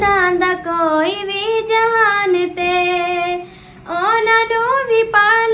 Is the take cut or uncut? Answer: uncut